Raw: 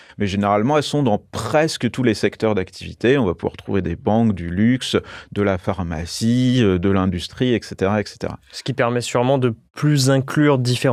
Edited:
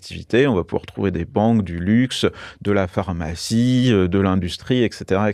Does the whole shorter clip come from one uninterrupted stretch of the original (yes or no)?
yes